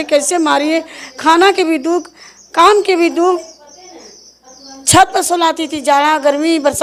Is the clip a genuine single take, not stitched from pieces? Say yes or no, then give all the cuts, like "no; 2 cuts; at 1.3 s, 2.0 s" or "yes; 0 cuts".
yes; 0 cuts